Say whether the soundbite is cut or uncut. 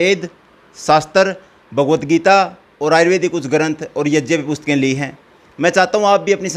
uncut